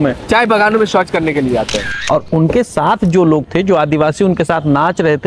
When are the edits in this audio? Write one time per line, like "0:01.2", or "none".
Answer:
0:01.9